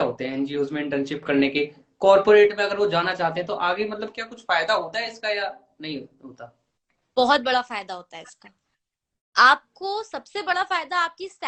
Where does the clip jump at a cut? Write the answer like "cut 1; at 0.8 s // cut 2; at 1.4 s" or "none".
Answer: none